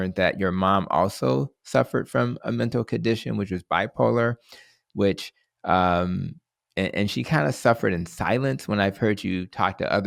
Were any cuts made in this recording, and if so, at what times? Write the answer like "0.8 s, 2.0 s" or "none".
none

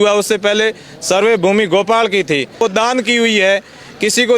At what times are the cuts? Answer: 2.6 s

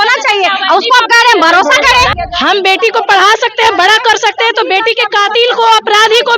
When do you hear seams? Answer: 2.1 s

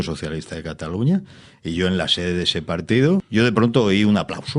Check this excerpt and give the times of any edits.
3.3 s

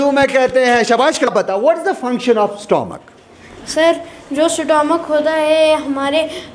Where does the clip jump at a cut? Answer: 1.3 s

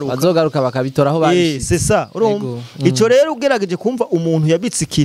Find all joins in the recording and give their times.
none

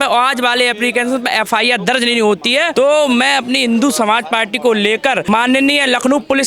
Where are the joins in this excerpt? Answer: 2.7 s, 5.2 s

